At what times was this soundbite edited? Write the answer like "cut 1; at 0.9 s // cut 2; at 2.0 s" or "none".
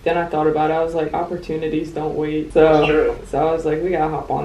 cut 1; at 2.5 s // cut 2; at 3.2 s